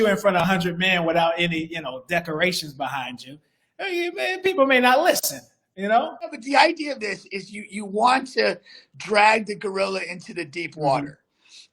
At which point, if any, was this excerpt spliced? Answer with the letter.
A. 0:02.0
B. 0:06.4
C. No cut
B